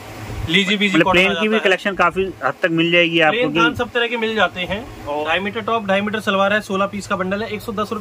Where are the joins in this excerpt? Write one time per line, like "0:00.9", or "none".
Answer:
0:05.2